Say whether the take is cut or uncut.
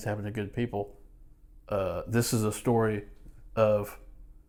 uncut